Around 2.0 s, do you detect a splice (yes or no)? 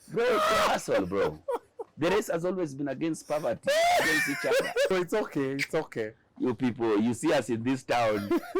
no